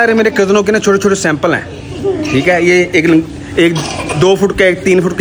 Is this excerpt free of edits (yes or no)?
yes